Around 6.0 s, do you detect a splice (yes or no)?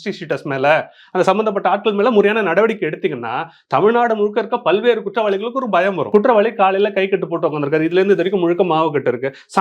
yes